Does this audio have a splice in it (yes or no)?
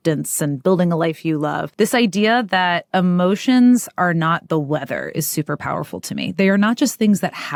no